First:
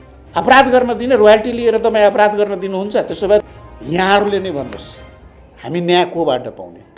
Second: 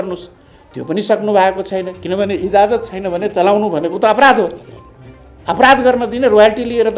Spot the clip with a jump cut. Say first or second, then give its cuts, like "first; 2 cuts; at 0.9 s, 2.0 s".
first; 1 cut; at 3.5 s